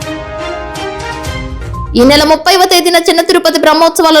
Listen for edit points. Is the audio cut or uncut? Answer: cut